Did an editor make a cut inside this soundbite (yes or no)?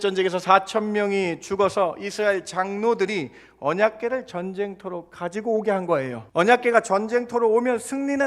yes